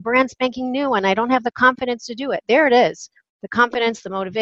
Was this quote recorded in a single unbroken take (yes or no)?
yes